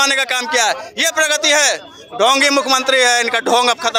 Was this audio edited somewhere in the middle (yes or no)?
no